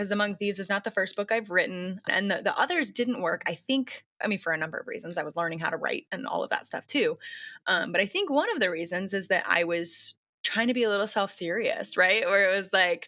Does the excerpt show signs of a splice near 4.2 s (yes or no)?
no